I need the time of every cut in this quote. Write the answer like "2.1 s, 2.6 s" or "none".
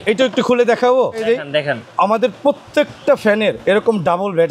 1.2 s